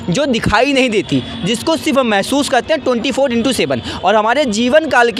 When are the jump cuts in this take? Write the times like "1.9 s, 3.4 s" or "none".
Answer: none